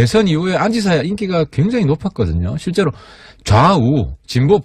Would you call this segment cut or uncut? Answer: cut